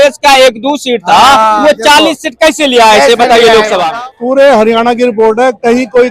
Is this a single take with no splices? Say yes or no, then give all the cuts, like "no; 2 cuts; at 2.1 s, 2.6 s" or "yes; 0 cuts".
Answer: no; 1 cut; at 3.9 s